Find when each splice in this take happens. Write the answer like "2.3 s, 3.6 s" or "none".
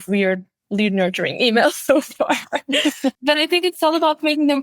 3.2 s